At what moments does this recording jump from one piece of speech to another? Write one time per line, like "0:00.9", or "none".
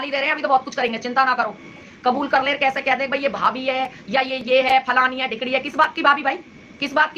0:01.9